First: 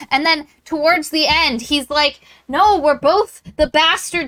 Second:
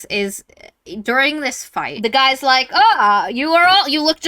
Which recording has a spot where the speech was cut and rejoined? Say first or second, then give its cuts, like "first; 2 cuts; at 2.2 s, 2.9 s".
second; 1 cut; at 1.9 s